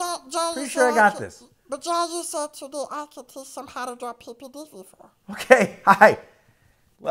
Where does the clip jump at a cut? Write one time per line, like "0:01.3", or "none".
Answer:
none